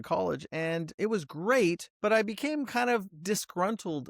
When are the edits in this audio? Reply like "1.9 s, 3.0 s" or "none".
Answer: 1.0 s, 1.9 s